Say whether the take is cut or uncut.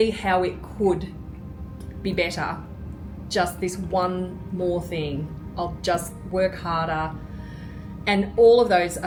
uncut